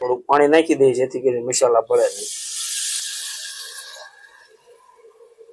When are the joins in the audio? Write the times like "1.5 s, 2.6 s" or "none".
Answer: none